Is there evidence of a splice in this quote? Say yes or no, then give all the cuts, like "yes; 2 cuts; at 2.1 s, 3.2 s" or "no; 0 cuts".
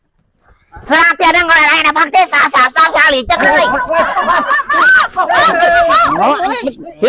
yes; 1 cut; at 3.4 s